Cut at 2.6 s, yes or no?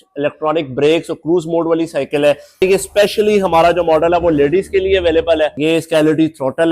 yes